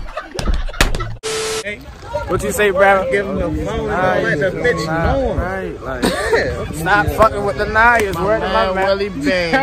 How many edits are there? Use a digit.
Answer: 1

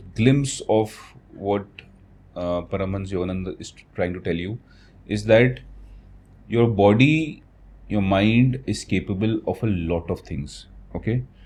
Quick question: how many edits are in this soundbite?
0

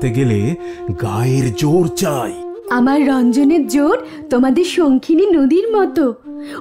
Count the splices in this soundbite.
0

